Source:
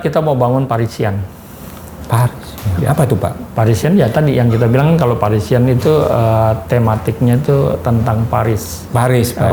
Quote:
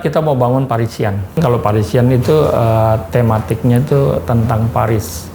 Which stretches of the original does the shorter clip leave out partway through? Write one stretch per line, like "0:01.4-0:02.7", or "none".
0:01.4-0:05.0